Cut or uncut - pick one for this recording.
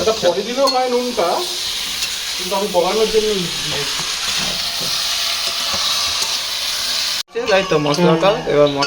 cut